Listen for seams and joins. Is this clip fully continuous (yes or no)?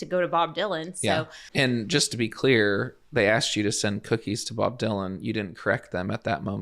no